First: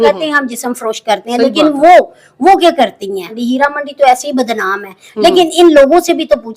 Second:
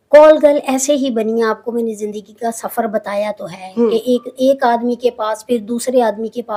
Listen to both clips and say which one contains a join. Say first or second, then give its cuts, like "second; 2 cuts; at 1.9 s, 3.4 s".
first; 1 cut; at 3.3 s